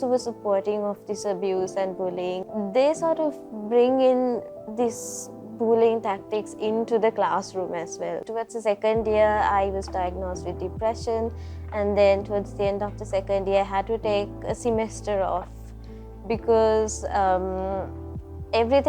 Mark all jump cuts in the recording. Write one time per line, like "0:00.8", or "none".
0:02.4
0:08.3